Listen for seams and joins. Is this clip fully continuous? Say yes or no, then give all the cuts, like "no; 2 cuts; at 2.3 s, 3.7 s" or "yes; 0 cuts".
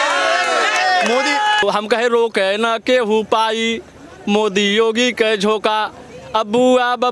no; 1 cut; at 1.6 s